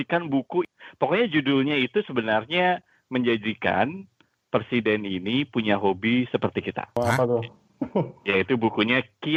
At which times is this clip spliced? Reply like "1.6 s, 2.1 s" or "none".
none